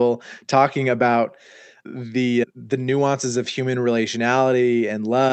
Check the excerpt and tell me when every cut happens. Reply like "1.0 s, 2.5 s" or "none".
none

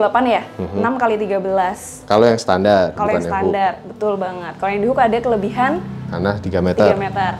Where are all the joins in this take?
none

